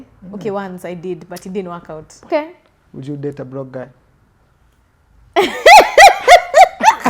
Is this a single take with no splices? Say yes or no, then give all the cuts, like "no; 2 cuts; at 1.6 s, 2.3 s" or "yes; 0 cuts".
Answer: no; 1 cut; at 2.3 s